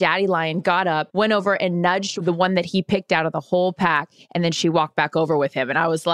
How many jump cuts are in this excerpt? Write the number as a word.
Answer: two